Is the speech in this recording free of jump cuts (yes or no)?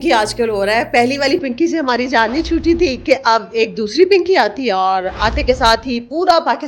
yes